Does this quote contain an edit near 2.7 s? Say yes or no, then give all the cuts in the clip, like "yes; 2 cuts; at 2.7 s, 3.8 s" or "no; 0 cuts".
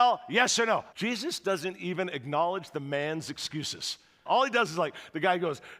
no; 2 cuts; at 0.9 s, 4.2 s